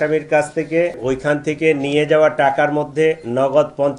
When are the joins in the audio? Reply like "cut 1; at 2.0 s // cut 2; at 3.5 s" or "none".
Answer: cut 1; at 1.0 s